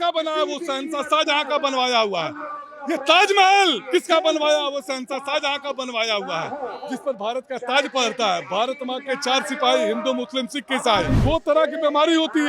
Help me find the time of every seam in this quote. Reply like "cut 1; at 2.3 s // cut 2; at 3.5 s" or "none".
cut 1; at 11.1 s